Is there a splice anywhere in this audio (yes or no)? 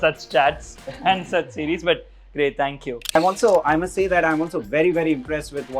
yes